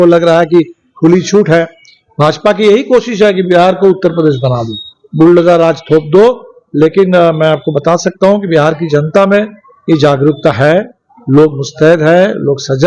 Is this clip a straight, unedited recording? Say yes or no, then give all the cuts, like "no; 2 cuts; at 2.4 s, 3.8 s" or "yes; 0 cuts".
yes; 0 cuts